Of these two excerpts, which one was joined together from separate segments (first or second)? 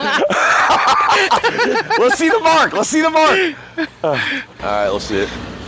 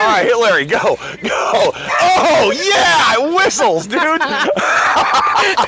first